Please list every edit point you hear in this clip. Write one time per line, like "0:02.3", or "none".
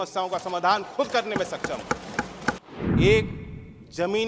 0:02.6